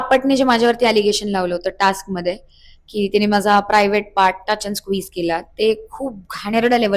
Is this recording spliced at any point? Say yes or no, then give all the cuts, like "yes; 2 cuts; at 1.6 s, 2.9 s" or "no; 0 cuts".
no; 0 cuts